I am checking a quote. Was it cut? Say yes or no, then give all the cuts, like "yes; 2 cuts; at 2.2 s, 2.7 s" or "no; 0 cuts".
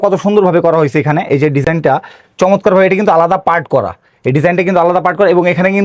no; 0 cuts